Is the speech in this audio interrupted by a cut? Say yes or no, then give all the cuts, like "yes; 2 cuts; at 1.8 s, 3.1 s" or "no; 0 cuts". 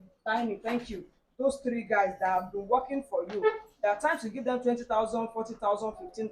no; 0 cuts